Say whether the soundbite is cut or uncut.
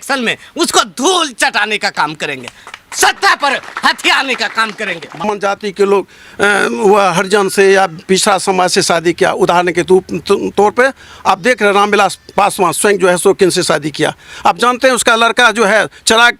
cut